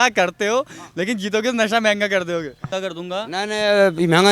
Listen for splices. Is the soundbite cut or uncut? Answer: cut